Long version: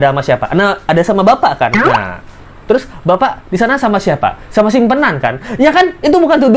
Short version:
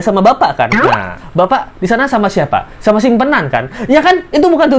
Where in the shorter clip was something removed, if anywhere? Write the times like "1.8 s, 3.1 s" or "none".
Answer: 1.2 s